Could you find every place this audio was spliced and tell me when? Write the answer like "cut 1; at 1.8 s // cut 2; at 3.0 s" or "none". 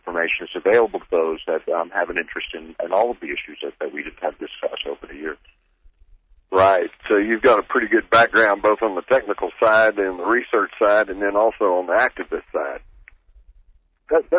cut 1; at 9.5 s